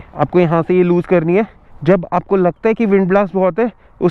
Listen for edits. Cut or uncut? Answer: cut